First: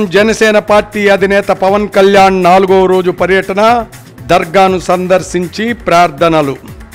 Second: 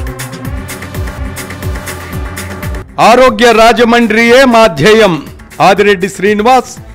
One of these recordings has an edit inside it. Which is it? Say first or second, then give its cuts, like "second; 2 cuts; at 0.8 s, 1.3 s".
second; 1 cut; at 1.0 s